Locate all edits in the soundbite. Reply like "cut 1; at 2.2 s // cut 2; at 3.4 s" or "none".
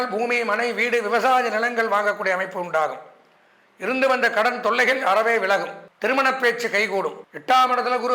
cut 1; at 5.8 s // cut 2; at 7.2 s